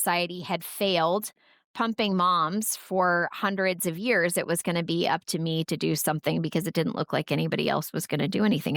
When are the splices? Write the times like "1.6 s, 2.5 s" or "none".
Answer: none